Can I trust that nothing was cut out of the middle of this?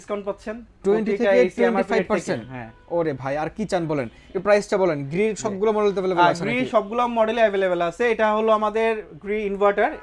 yes; 0 cuts

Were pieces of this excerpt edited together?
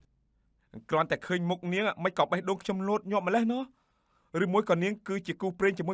no; 0 cuts

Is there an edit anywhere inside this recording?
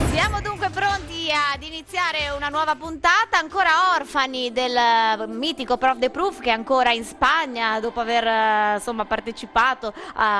no; 0 cuts

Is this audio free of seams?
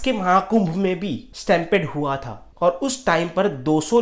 yes; 0 cuts

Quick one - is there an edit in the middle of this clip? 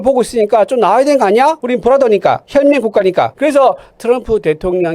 yes; 2 cuts; at 1.6 s, 3.3 s

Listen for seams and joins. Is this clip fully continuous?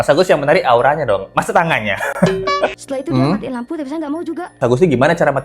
no; 2 cuts; at 2.8 s, 4.6 s

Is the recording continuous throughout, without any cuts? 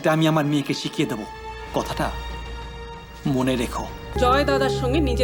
no; 1 cut; at 4.2 s

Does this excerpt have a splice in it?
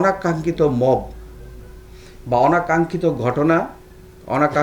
no; 0 cuts

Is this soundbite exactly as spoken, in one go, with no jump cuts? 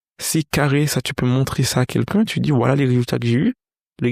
yes; 0 cuts

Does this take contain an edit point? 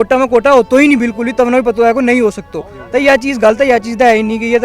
no; 0 cuts

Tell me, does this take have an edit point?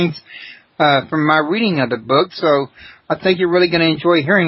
yes; 1 cut; at 3.4 s

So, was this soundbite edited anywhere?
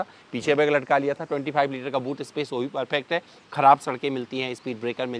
yes; 1 cut; at 3.4 s

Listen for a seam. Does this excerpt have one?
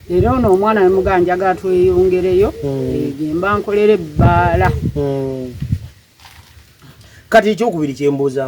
no; 0 cuts

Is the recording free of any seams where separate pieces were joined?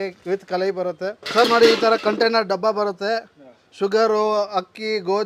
no; 1 cut; at 1.2 s

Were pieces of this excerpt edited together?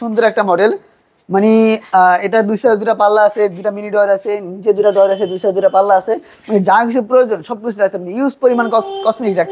no; 0 cuts

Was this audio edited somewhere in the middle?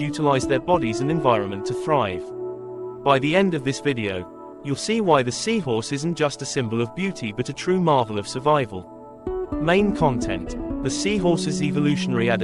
no; 0 cuts

